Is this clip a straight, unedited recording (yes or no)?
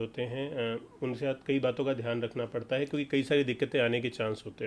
yes